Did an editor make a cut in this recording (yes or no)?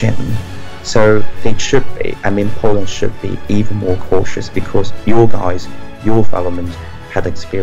no